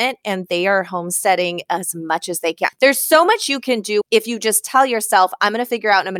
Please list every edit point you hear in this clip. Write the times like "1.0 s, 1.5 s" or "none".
2.7 s, 4.0 s